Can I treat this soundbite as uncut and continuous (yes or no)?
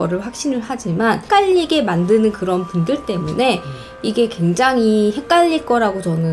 yes